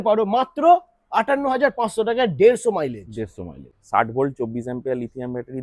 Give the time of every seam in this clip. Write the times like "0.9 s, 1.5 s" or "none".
3.8 s

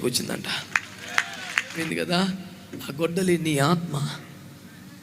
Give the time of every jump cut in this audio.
1.8 s

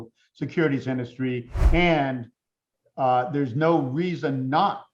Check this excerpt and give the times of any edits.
1.6 s

